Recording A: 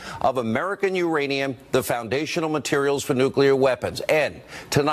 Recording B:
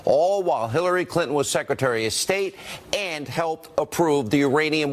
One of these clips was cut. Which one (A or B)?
A